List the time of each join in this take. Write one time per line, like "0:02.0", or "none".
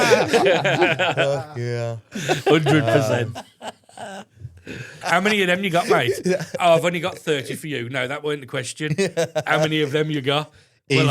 0:04.9